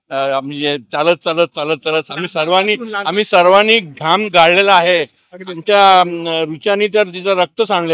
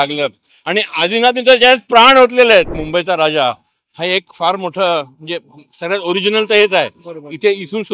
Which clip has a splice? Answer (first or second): second